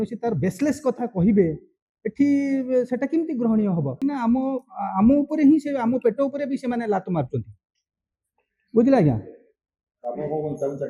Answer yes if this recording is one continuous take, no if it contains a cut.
no